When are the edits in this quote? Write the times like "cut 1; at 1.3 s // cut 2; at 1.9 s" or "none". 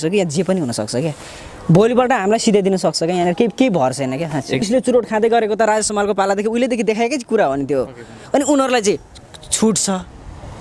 cut 1; at 4.6 s